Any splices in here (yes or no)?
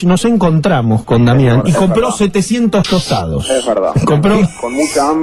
no